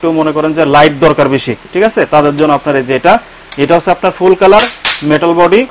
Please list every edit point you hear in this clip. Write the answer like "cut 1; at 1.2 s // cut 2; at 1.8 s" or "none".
cut 1; at 1.6 s